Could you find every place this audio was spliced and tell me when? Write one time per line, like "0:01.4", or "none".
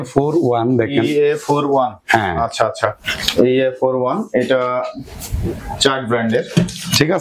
none